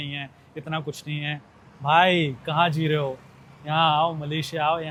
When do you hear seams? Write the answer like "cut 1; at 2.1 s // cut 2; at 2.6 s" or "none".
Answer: none

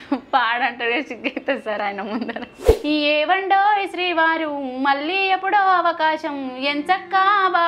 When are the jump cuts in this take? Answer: cut 1; at 2.6 s

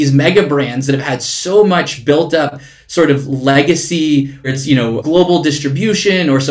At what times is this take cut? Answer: cut 1; at 4.7 s

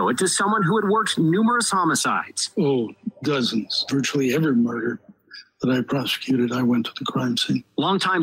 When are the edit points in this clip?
cut 1; at 3.0 s

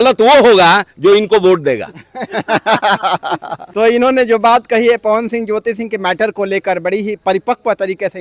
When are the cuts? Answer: none

